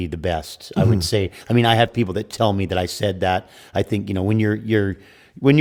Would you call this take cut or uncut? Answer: uncut